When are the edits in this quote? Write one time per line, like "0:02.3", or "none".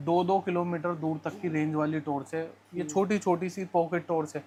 none